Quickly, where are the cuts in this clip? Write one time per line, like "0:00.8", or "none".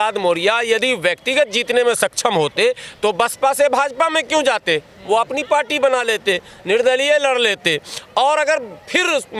none